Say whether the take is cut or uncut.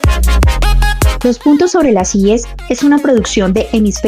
cut